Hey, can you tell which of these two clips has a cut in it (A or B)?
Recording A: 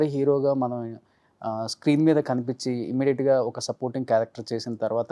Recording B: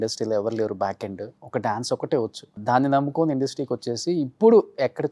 B